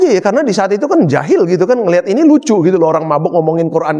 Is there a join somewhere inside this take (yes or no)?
no